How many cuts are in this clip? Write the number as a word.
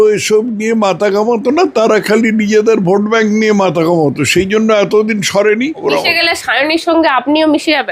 one